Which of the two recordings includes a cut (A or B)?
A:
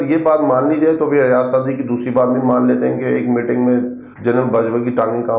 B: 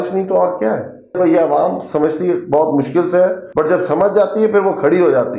B